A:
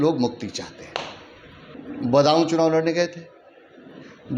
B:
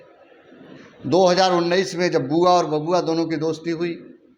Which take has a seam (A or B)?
A